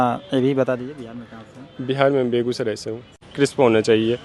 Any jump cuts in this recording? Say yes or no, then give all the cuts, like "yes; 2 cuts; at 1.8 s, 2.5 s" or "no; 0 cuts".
yes; 1 cut; at 3.2 s